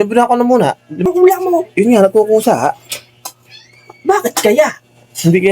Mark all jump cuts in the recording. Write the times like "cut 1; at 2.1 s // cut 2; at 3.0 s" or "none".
cut 1; at 1.0 s